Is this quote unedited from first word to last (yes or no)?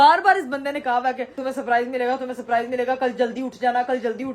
no